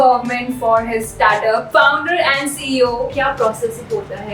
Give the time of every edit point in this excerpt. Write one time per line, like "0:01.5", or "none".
0:01.7
0:03.1